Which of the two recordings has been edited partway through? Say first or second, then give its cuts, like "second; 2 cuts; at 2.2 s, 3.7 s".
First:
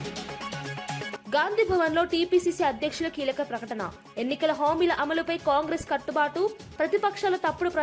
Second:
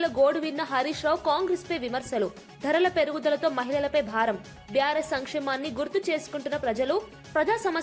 first; 1 cut; at 1.2 s